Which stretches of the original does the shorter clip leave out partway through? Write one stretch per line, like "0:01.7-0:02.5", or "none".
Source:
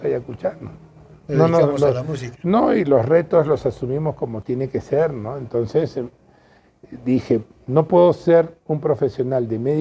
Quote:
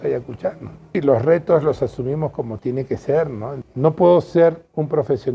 0:01.0-0:02.8
0:05.4-0:07.5